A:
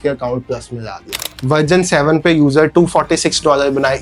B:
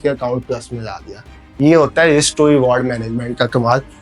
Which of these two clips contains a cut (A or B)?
A